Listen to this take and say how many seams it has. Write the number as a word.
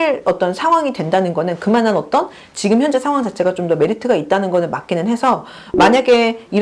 zero